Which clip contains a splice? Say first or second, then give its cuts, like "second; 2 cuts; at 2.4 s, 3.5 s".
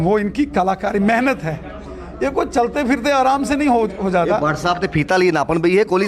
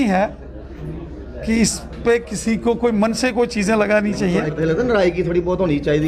second; 1 cut; at 4.5 s